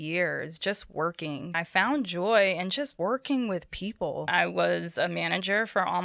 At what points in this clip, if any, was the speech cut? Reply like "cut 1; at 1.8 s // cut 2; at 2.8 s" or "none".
cut 1; at 1.6 s // cut 2; at 2.9 s // cut 3; at 4.2 s